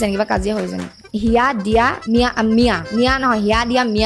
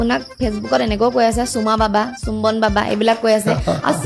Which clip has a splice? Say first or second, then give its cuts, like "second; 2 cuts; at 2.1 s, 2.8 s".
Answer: first; 3 cuts; at 1.0 s, 2.0 s, 2.8 s